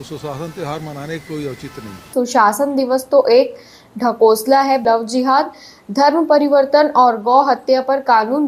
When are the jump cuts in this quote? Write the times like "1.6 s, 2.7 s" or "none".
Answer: 2.1 s, 4.8 s